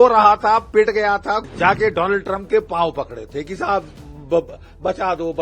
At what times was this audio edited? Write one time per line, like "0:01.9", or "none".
0:01.4